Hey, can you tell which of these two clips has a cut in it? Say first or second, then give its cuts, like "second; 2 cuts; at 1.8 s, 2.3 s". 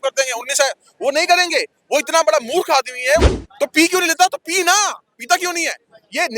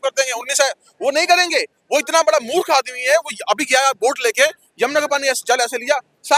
first; 1 cut; at 3.3 s